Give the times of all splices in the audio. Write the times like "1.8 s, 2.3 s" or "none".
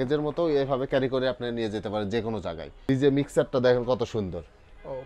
2.7 s